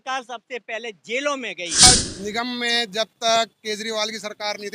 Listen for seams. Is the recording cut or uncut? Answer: cut